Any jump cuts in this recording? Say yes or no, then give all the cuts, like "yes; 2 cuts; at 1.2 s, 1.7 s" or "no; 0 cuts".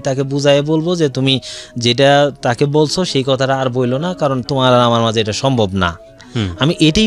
no; 0 cuts